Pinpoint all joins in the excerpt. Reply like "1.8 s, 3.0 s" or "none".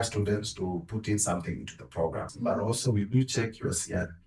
2.3 s